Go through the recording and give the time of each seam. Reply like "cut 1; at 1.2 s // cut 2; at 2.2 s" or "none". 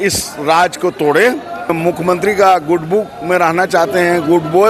cut 1; at 1.7 s